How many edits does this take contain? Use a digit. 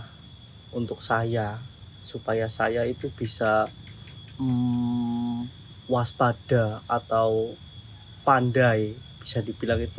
0